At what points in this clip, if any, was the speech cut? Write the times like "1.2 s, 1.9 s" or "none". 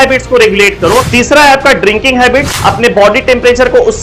1.1 s, 2.5 s